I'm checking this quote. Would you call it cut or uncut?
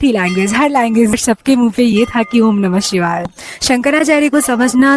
cut